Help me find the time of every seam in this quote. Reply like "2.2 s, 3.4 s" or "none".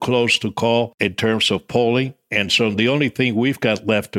0.9 s

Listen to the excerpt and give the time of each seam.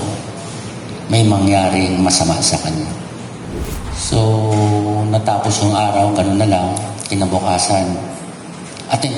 3.6 s

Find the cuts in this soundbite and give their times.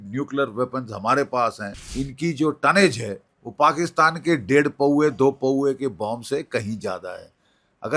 1.9 s

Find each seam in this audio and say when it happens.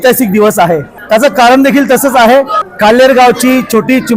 0.9 s, 2.6 s

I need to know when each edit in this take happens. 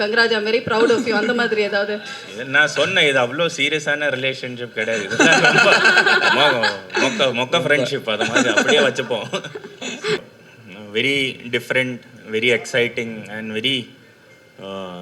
10.2 s

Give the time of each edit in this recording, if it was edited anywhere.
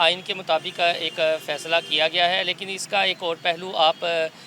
none

